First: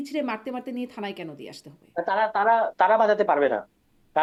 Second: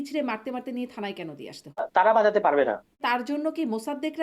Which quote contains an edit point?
second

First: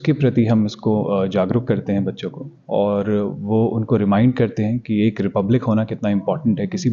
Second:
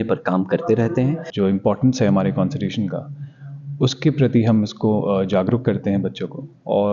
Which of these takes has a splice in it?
second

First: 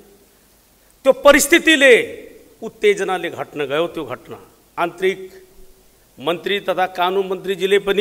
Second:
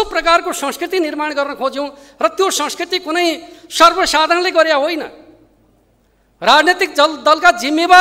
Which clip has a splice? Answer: first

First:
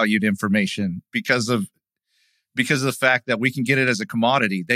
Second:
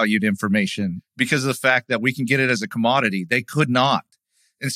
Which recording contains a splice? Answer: second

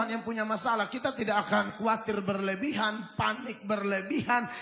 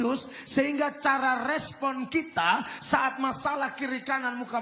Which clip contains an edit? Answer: first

